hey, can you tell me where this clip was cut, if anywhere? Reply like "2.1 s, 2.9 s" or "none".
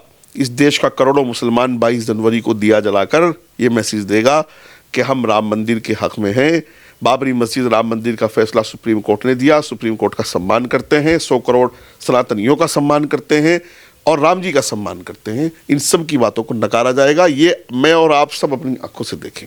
none

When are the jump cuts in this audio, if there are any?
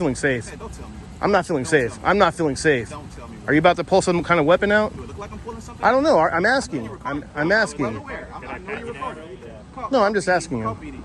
9.4 s

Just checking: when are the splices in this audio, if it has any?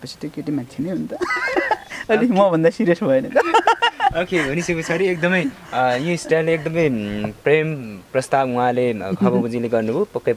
none

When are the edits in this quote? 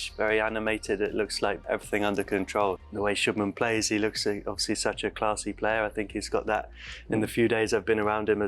1.6 s, 2.8 s

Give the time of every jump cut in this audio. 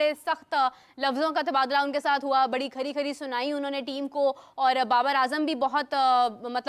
none

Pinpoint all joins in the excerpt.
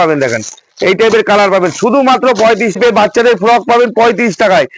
2.8 s

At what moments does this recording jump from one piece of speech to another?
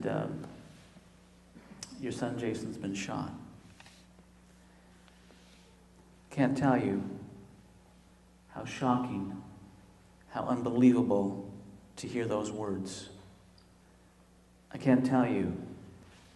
12.4 s

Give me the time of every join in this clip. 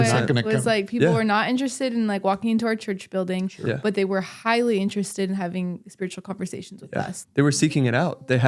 7.2 s

